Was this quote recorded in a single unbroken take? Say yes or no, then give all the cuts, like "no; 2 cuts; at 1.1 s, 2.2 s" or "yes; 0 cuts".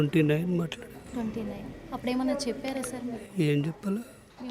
no; 1 cut; at 3.0 s